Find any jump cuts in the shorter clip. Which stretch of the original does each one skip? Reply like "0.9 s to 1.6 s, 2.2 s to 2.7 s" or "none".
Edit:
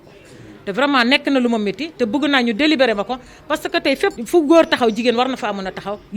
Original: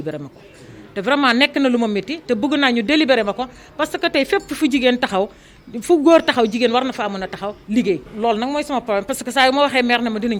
4.5 s to 5.8 s